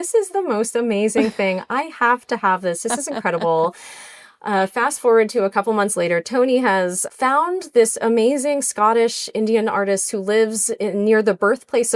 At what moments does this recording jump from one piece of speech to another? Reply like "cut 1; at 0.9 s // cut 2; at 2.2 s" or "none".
cut 1; at 7.0 s